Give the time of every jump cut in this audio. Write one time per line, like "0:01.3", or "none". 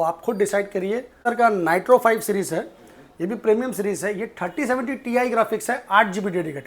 0:01.2